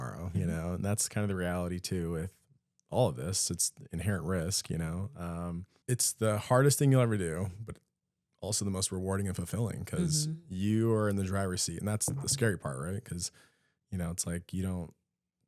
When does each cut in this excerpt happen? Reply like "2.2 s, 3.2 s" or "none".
5.7 s

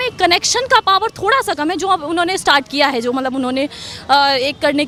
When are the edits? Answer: none

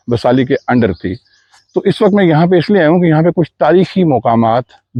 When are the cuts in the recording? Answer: none

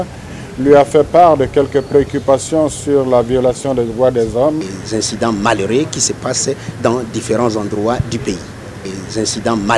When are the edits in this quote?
4.7 s, 8.8 s

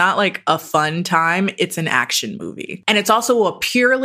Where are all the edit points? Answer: 2.7 s

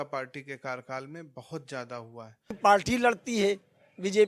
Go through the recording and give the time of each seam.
2.6 s

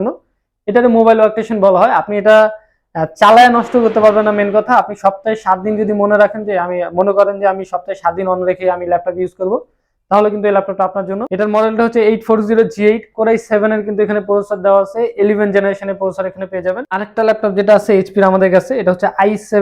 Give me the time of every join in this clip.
11.2 s, 16.9 s

